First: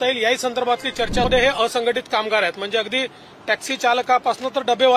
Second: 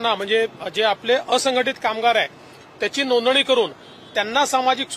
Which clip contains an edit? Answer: first; 1 cut; at 1.3 s

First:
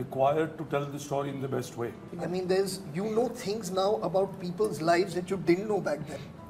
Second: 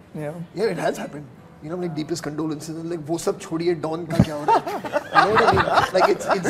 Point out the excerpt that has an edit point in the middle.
first; 1 cut; at 2.1 s

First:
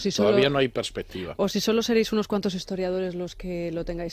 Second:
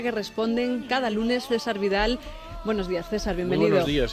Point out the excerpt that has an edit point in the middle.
second; 1 cut; at 1.2 s

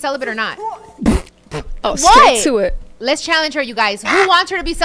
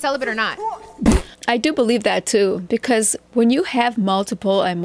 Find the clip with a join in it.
first; 1 cut; at 1.4 s

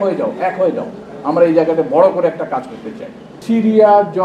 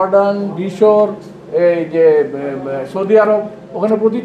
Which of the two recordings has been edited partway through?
first; 1 cut; at 3.4 s

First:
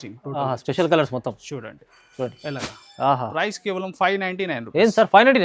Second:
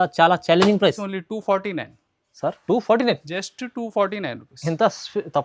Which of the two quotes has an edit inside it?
second; 1 cut; at 1.0 s

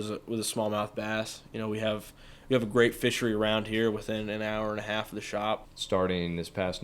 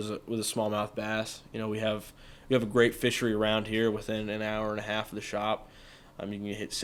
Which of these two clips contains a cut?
first; 1 cut; at 5.7 s

